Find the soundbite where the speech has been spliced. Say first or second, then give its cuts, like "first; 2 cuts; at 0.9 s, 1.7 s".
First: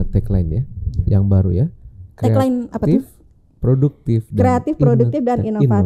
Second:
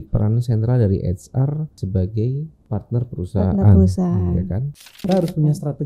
second; 3 cuts; at 1.8 s, 2.6 s, 5.0 s